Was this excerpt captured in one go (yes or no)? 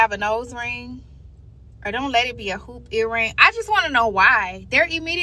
yes